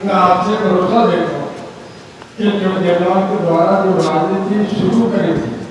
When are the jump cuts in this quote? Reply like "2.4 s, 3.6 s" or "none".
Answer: none